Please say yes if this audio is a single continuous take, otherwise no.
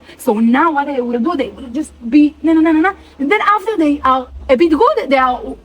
no